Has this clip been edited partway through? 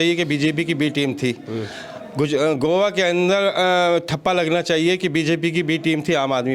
no; 0 cuts

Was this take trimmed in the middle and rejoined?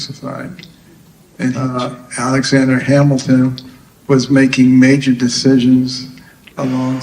yes; 1 cut; at 1.7 s

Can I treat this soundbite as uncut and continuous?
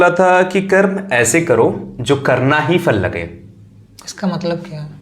yes; 0 cuts

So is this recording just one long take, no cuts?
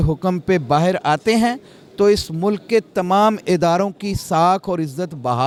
yes; 0 cuts

